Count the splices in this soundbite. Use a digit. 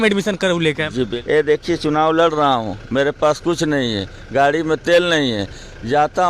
1